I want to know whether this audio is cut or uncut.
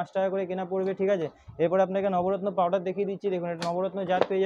uncut